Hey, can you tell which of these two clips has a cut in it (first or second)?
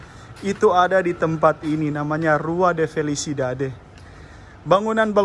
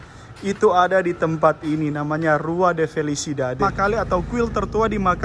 second